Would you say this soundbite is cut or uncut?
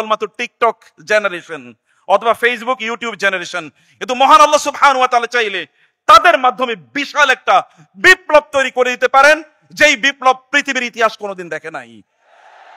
uncut